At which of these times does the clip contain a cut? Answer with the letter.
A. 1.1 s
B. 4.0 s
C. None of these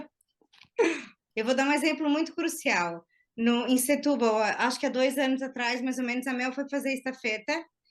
A